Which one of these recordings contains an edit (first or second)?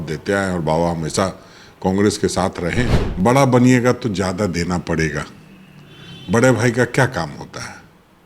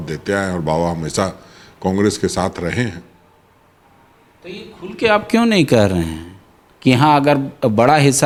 first